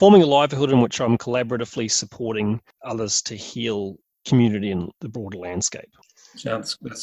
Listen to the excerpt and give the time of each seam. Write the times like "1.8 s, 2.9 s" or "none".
2.7 s, 5.0 s